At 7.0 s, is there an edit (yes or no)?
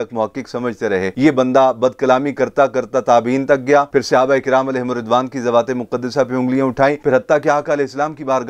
yes